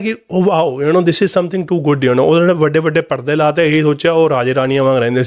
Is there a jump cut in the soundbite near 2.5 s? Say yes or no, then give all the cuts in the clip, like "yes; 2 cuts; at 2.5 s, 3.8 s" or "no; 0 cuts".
no; 0 cuts